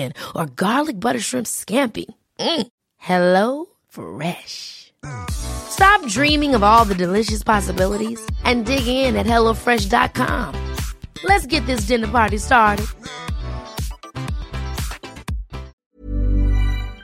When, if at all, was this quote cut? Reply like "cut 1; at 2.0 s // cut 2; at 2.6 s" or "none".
cut 1; at 15.8 s